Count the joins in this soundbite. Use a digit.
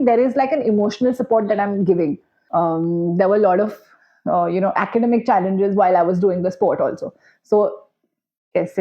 1